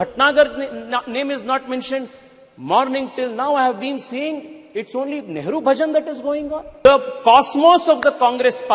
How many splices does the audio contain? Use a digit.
1